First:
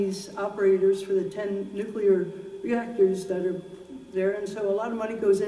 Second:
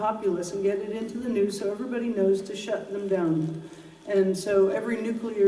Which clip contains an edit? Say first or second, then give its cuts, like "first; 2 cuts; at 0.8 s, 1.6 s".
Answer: first; 1 cut; at 3.7 s